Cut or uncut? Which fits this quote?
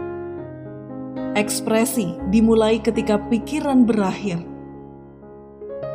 cut